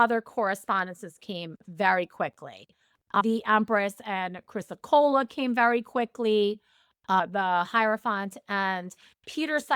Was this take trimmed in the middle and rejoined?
yes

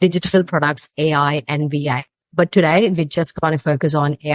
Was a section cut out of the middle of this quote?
yes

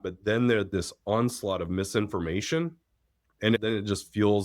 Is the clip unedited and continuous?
no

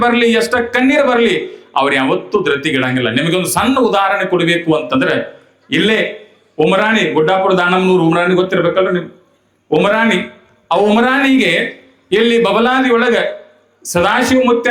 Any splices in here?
no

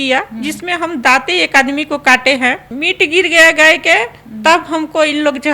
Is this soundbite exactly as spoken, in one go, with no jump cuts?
no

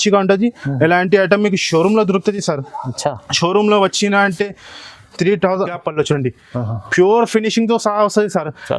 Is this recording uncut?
no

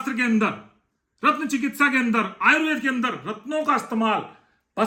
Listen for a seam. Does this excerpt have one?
no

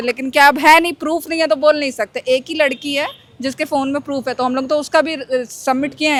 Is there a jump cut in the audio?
no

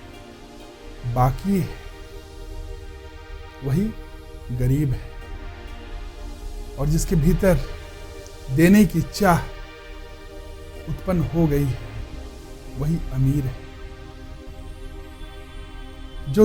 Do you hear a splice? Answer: no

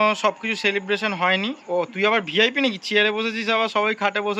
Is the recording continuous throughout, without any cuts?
yes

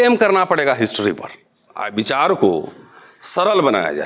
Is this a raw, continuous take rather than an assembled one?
no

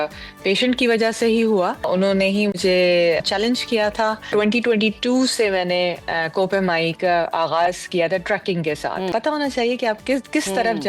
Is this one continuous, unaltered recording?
no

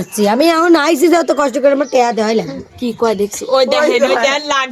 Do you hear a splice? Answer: no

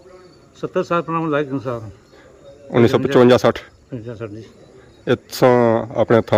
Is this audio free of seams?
yes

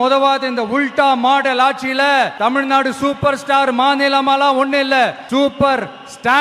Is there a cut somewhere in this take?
yes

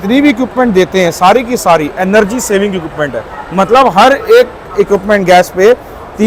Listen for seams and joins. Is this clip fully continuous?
yes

